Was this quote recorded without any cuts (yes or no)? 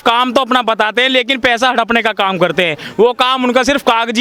yes